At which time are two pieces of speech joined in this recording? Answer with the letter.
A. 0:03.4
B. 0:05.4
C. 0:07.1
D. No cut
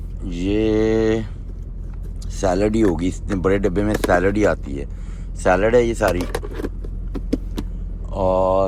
D